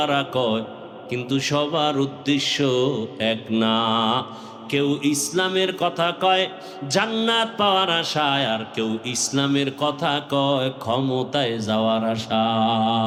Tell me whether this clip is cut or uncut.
uncut